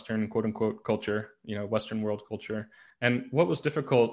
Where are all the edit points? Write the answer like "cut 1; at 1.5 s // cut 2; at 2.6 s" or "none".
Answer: cut 1; at 2.8 s